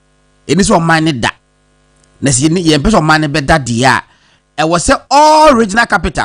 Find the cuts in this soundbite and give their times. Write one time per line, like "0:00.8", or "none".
0:05.3